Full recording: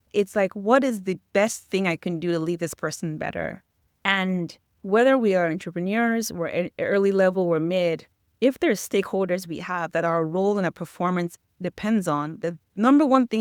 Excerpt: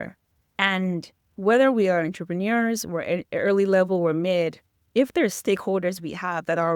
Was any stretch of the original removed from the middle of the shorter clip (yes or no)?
no